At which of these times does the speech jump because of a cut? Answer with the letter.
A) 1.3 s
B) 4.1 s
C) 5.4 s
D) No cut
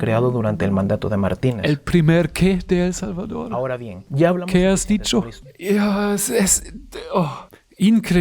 C